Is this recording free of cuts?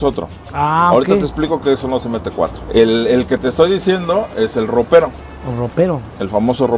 yes; 0 cuts

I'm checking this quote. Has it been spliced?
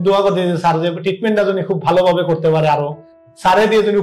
yes; 1 cut; at 3.1 s

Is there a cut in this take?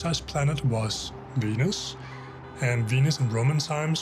no; 0 cuts

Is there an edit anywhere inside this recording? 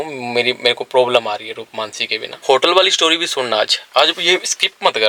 yes; 1 cut; at 2.3 s

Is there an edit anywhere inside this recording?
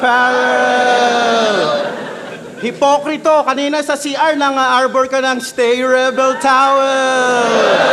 no; 0 cuts

